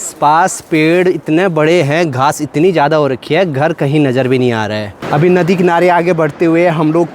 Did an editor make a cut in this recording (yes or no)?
yes